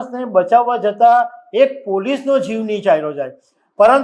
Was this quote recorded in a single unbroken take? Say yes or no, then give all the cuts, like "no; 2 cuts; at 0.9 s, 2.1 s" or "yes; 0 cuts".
yes; 0 cuts